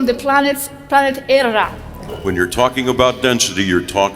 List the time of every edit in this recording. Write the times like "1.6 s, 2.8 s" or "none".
2.1 s